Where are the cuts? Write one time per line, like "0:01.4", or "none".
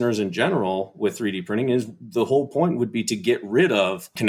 none